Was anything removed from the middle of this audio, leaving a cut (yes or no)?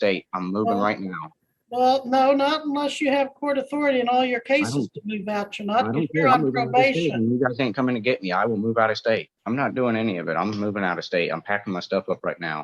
yes